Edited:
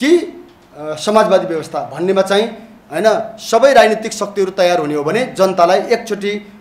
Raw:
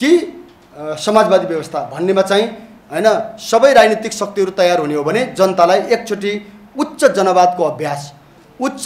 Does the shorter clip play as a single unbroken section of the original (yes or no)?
yes